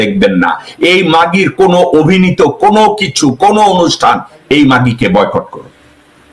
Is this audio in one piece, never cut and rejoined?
yes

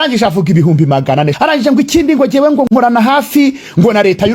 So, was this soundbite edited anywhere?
yes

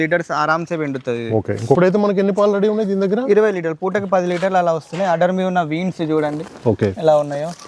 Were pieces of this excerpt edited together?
yes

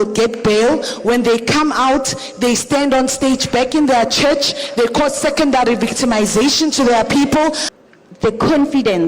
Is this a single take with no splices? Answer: no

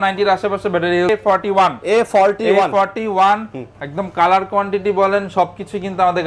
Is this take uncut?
no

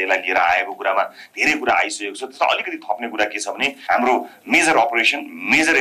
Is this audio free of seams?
no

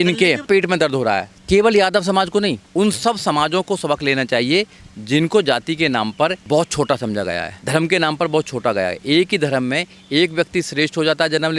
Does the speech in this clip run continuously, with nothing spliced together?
no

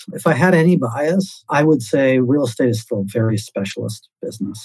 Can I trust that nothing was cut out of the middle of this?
no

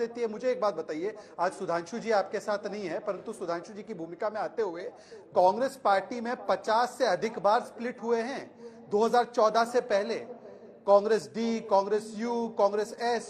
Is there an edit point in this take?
no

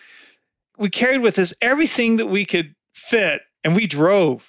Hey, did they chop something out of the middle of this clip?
yes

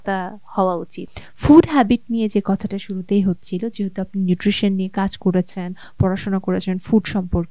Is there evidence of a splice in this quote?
no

